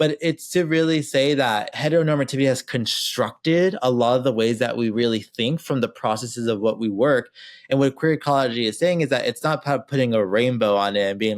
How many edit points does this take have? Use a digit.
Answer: 1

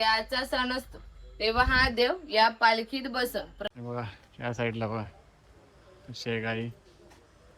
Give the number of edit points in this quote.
1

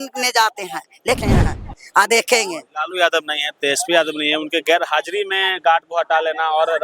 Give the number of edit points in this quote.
1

